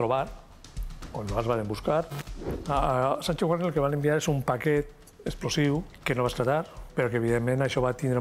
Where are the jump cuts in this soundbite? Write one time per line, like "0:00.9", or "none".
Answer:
0:02.6
0:05.9
0:06.9